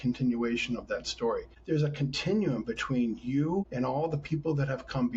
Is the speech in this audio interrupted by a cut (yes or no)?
yes